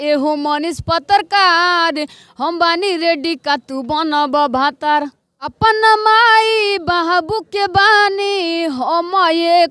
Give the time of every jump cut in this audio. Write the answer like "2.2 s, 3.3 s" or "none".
none